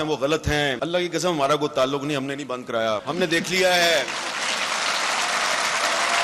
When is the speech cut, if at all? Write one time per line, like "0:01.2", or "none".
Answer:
0:00.8
0:03.1